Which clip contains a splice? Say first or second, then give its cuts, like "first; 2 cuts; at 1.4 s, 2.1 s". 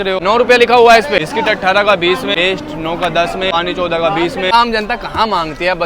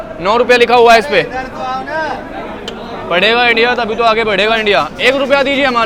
first; 4 cuts; at 1.2 s, 2.3 s, 3.5 s, 4.5 s